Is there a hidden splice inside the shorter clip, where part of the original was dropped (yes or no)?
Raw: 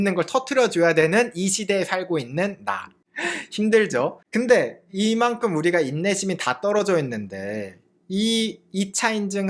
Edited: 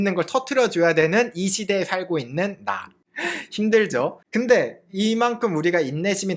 no